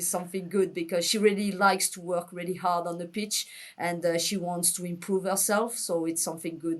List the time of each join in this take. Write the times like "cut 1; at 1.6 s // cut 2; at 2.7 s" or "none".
cut 1; at 1.1 s

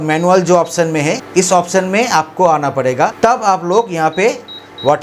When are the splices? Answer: none

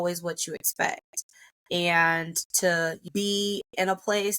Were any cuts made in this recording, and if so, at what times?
cut 1; at 3.0 s

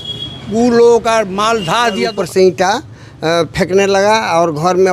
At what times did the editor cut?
cut 1; at 2.1 s

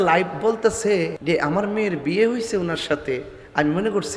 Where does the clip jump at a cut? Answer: cut 1; at 1.2 s

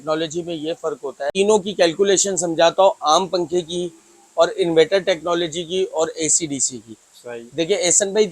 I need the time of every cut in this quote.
cut 1; at 1.2 s

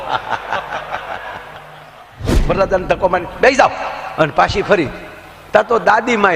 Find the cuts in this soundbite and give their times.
cut 1; at 2.2 s

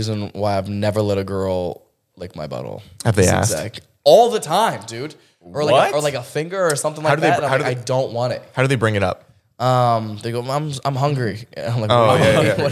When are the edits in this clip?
none

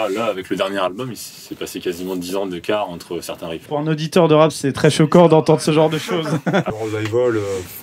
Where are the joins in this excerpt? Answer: cut 1; at 3.6 s // cut 2; at 6.7 s

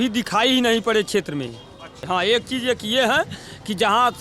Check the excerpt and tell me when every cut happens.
cut 1; at 1.9 s

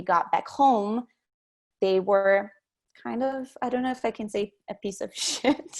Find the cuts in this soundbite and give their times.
cut 1; at 3.3 s

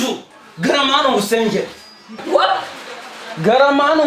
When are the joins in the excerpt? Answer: none

